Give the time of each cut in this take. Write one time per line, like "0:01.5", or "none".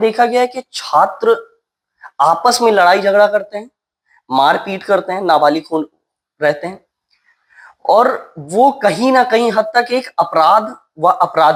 none